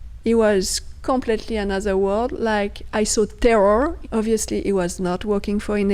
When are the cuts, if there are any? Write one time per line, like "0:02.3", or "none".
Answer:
0:04.0

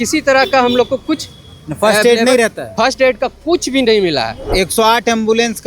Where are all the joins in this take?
0:04.4

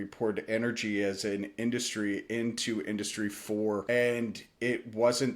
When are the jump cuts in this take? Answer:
0:03.8

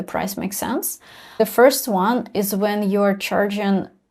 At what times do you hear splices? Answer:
0:01.4

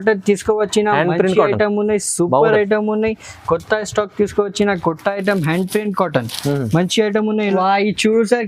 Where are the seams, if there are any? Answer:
0:07.6

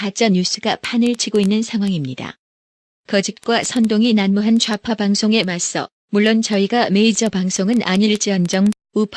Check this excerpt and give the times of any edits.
0:06.3

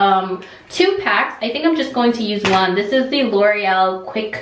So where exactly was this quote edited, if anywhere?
none

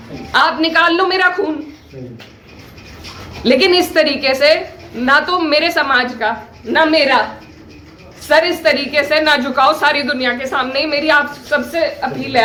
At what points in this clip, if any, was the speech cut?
none

